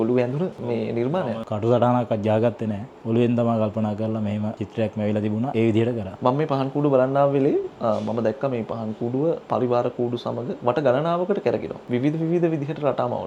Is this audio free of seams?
yes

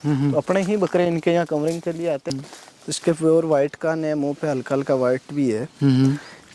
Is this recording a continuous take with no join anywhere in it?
no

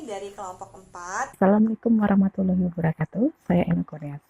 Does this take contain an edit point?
yes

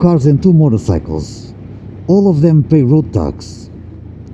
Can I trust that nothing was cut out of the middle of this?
yes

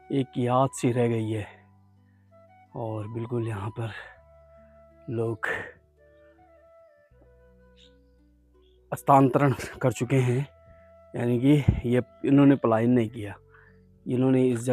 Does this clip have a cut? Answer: yes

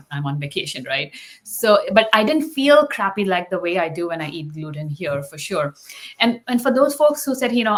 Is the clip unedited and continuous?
yes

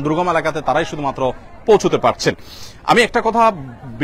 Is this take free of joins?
yes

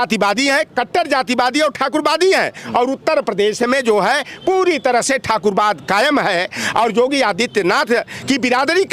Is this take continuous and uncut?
yes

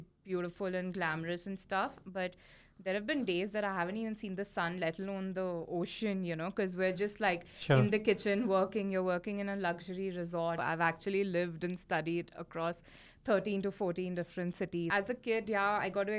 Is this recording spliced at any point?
yes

